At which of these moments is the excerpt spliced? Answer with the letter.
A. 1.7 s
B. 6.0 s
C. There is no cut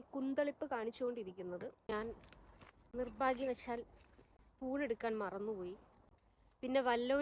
A